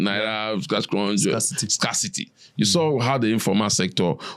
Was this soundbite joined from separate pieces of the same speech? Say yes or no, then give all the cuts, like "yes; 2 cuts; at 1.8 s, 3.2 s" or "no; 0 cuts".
no; 0 cuts